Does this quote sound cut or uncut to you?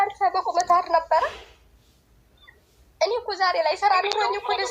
uncut